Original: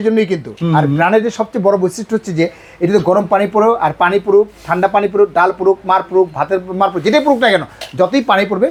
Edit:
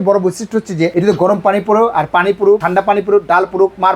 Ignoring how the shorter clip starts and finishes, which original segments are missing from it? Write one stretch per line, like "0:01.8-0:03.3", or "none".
0:02.5-0:02.8
0:04.5-0:04.7